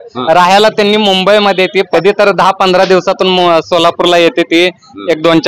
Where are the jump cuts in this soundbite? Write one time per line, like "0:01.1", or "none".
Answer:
0:01.9